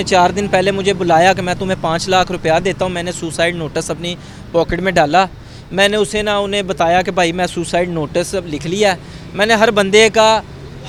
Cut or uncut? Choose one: uncut